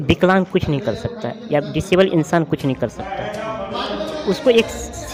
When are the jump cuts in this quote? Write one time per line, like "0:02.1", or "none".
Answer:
none

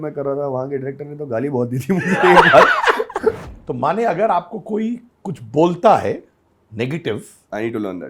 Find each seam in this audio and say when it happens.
0:03.4

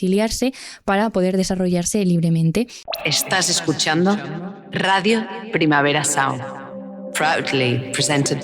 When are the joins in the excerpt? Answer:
0:02.8

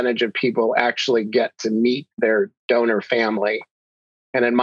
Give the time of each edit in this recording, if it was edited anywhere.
none

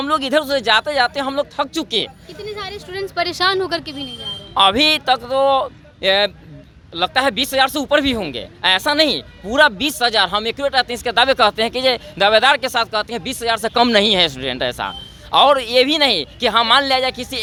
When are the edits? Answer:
none

